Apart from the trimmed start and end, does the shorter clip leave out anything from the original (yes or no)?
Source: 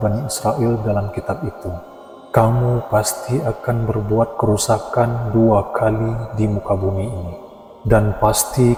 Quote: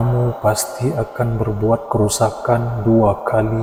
no